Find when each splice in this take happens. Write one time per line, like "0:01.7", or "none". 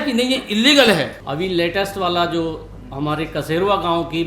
0:01.2